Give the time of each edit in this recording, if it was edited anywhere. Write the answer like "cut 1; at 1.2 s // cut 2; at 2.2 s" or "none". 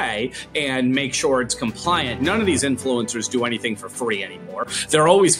cut 1; at 2.1 s